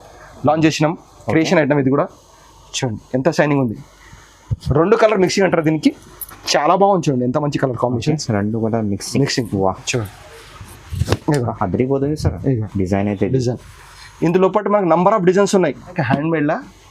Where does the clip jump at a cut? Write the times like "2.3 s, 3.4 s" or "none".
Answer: 15.9 s